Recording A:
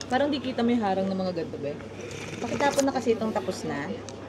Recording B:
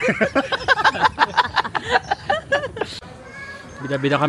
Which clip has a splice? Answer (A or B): B